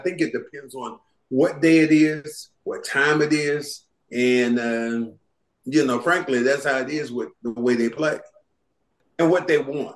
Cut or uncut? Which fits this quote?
cut